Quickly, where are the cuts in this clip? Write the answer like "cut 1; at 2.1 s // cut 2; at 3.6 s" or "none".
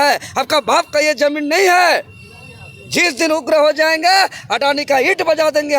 none

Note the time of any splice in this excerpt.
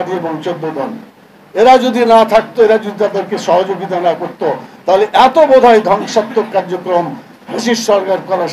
none

